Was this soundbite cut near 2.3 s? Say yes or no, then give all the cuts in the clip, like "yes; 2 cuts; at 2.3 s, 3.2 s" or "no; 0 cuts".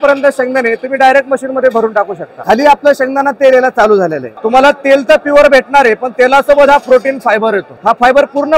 yes; 3 cuts; at 2.3 s, 4.3 s, 7.7 s